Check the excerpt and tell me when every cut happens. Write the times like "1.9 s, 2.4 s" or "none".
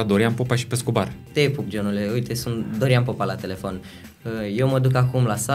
1.3 s